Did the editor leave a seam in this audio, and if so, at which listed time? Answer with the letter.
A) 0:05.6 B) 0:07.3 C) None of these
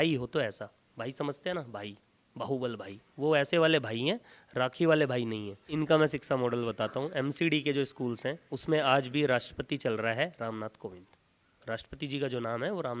A